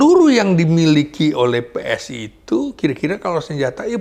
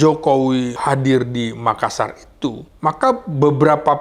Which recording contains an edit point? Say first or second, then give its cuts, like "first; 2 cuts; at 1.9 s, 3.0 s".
second; 2 cuts; at 0.8 s, 2.7 s